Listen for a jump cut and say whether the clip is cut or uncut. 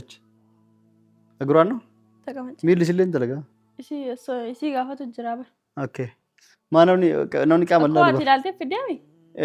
uncut